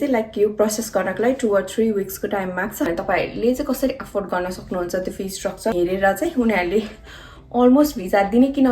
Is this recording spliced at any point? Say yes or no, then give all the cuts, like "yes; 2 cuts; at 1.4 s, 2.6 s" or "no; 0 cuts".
yes; 2 cuts; at 2.9 s, 5.7 s